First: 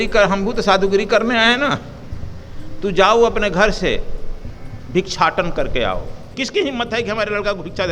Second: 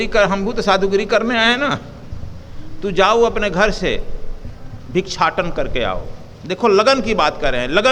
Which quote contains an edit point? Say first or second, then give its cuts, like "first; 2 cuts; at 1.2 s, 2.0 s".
first; 1 cut; at 6.3 s